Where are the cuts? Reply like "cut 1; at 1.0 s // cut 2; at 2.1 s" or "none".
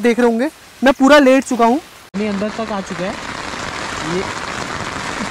cut 1; at 2.0 s